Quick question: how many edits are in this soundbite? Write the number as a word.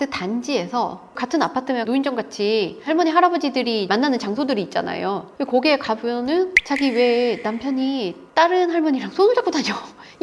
one